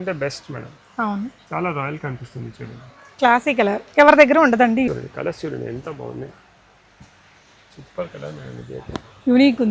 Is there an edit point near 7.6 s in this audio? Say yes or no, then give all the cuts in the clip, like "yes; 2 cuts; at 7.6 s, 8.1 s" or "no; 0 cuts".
no; 1 cut; at 4.9 s